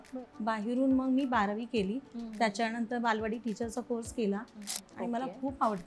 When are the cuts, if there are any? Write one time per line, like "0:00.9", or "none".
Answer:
0:04.8